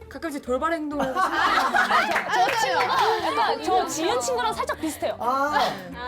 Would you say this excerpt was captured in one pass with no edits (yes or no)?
yes